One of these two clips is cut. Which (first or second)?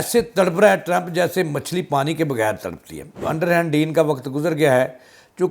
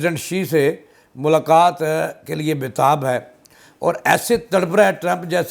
first